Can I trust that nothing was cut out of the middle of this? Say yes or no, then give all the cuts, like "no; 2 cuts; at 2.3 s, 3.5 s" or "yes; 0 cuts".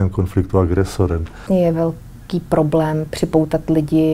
no; 1 cut; at 1.4 s